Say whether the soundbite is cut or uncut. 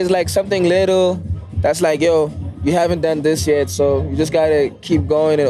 cut